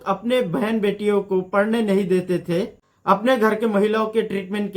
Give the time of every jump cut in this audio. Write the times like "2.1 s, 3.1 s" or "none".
2.8 s